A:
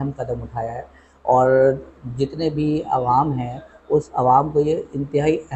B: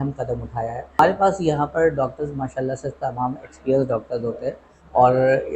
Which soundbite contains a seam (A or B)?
B